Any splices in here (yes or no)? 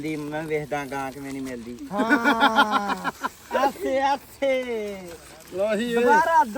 no